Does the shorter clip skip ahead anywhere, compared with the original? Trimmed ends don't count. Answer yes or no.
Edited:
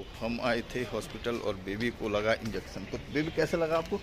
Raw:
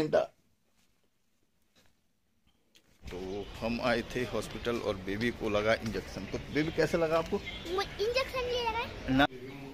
no